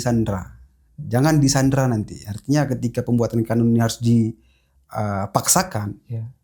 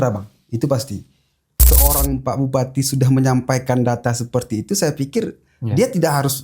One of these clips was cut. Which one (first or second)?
second